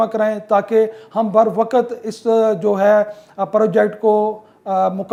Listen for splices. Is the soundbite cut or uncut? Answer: uncut